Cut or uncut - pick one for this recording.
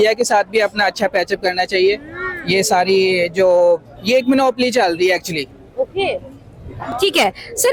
uncut